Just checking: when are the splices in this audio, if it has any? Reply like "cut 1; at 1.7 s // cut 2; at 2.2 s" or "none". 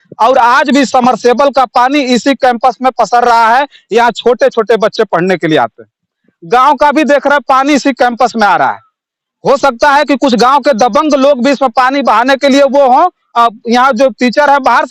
cut 1; at 6.3 s